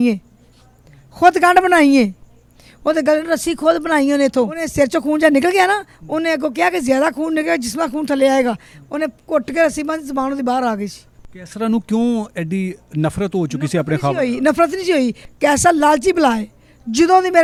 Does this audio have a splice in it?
no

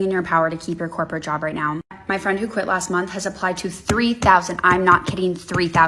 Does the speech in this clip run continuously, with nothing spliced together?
yes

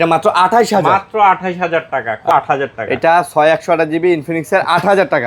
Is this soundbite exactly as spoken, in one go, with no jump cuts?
no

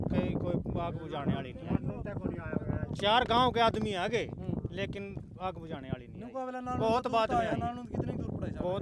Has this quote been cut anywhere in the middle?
no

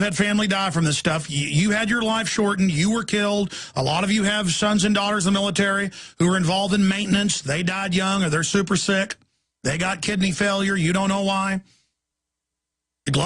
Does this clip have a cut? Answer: yes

